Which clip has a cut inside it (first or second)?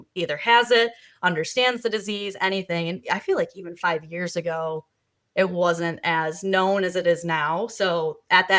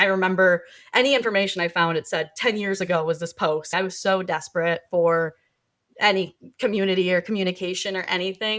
second